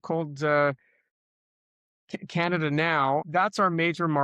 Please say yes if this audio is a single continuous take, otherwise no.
no